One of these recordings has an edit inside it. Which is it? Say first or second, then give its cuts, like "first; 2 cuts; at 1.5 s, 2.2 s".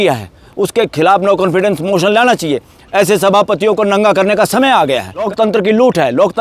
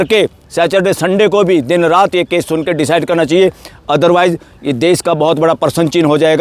first; 1 cut; at 5.3 s